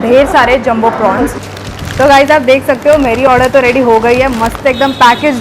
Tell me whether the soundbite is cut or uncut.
cut